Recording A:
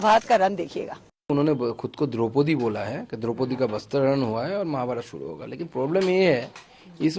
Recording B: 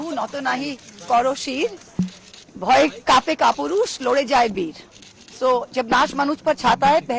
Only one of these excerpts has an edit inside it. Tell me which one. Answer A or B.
A